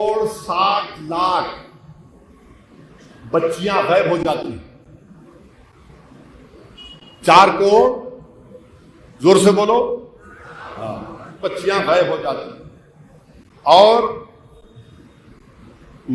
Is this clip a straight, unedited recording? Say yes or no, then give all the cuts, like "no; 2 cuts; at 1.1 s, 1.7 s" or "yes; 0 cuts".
yes; 0 cuts